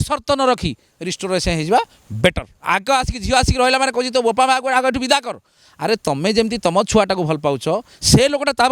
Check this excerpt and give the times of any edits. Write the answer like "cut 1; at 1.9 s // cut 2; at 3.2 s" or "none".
cut 1; at 2.5 s